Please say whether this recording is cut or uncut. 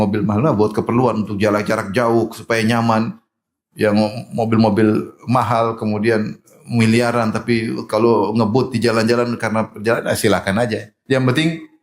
uncut